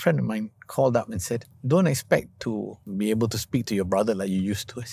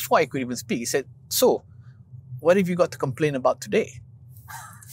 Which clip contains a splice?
first; 2 cuts; at 1.5 s, 2.9 s

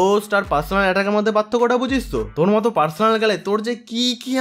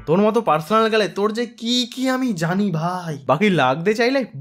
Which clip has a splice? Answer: second; 1 cut; at 3.2 s

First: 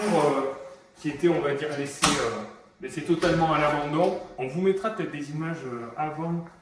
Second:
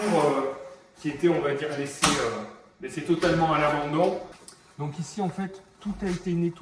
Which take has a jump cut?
second; 1 cut; at 4.3 s

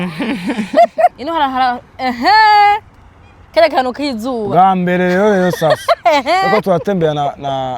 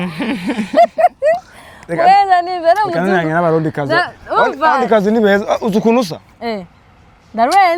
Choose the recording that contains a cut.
first; 1 cut; at 1.2 s

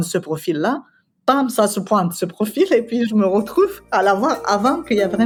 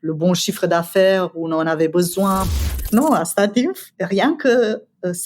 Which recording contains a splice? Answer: second; 2 cuts; at 2.5 s, 3.9 s

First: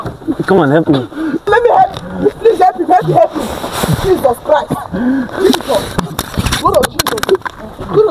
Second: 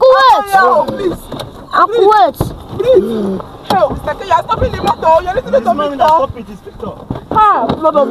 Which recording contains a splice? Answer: first; 1 cut; at 1.5 s

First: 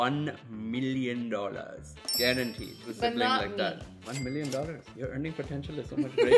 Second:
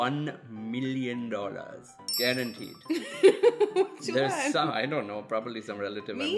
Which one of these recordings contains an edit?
first; 2 cuts; at 2.8 s, 4.9 s

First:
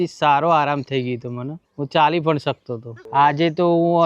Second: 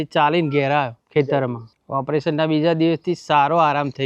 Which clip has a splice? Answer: first; 1 cut; at 2.9 s

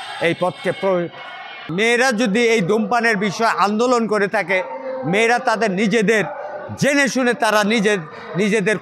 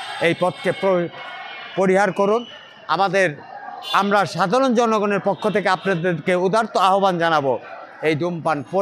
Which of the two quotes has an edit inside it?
first; 1 cut; at 1.6 s

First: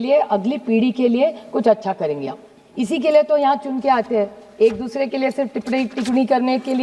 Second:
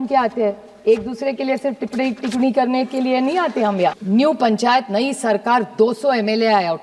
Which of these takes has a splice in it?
second; 1 cut; at 4.0 s

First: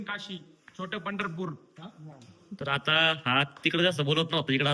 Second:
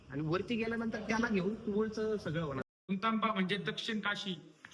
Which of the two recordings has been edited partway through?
second; 1 cut; at 2.9 s

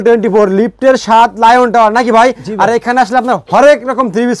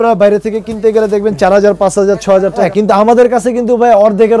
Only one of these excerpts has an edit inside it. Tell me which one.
second; 1 cut; at 2.7 s

